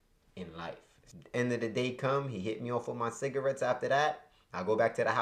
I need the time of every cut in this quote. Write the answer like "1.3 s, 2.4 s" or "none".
1.0 s